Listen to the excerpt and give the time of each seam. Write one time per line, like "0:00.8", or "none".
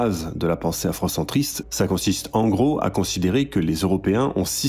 none